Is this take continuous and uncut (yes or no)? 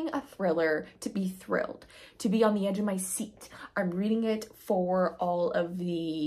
yes